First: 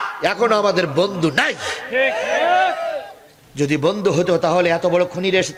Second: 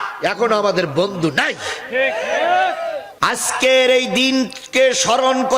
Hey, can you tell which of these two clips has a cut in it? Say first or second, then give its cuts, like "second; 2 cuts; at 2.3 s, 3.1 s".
second; 1 cut; at 3.1 s